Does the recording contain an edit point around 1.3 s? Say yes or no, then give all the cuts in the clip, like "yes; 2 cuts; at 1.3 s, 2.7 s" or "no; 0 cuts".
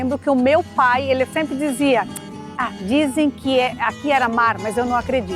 yes; 1 cut; at 1.3 s